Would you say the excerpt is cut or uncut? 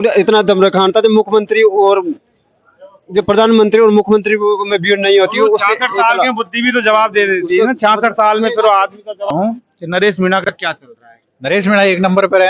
uncut